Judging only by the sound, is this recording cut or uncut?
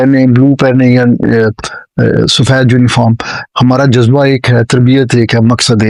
uncut